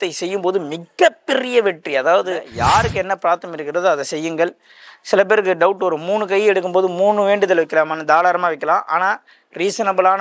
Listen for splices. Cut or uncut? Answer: cut